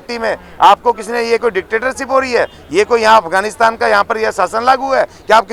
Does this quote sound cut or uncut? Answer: uncut